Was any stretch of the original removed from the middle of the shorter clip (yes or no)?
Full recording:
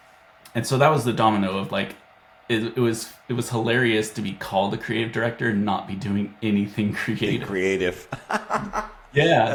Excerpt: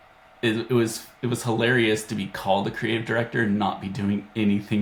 no